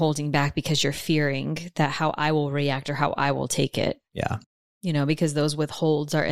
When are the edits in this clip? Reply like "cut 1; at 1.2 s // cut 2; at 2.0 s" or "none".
none